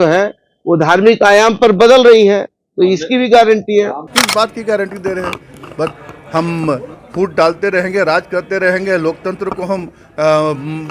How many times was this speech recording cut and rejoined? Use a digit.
1